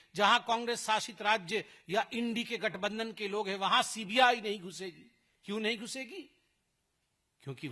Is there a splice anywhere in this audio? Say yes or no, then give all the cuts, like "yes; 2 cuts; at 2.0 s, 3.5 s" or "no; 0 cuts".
no; 0 cuts